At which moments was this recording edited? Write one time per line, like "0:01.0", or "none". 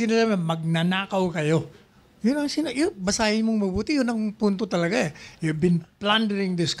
none